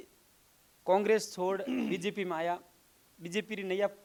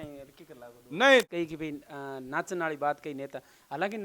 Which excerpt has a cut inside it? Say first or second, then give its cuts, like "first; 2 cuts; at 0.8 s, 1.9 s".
second; 1 cut; at 1.3 s